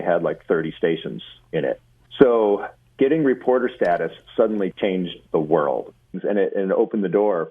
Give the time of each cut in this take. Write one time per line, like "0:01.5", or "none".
0:01.9
0:06.1